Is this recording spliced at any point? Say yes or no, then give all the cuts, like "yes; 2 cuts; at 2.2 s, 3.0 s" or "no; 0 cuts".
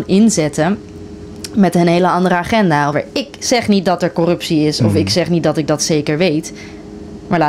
yes; 1 cut; at 3.0 s